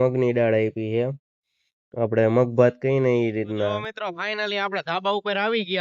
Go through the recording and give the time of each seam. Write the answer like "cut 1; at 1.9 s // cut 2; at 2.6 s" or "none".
cut 1; at 3.9 s

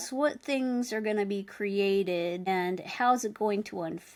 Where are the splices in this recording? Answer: none

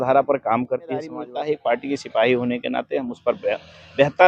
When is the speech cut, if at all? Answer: cut 1; at 1.2 s

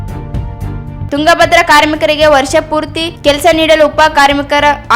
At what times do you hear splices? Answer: cut 1; at 1.0 s

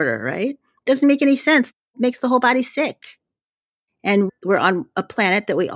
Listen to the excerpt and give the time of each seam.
cut 1; at 1.8 s // cut 2; at 3.4 s

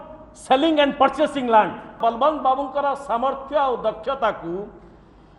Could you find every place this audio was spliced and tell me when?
cut 1; at 2.0 s

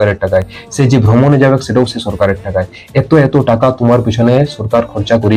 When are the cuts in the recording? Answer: none

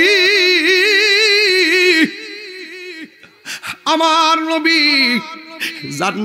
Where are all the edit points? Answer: none

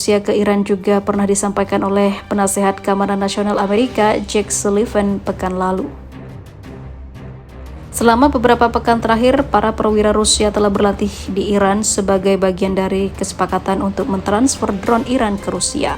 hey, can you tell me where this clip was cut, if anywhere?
cut 1; at 5.9 s // cut 2; at 7.6 s

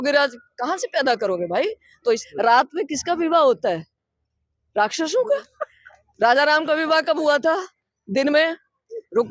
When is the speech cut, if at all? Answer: cut 1; at 2.2 s

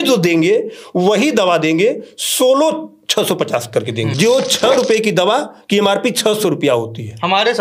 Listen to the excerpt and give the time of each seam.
cut 1; at 4.1 s

